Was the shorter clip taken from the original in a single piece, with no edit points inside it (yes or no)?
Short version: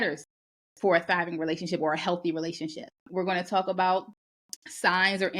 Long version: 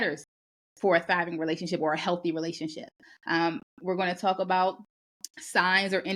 no